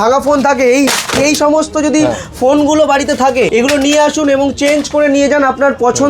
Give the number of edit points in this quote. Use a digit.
1